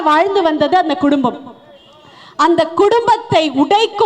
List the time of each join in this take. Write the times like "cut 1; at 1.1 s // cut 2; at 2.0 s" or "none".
none